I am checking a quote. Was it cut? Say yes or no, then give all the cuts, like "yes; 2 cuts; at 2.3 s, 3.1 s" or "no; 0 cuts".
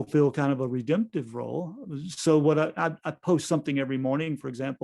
no; 0 cuts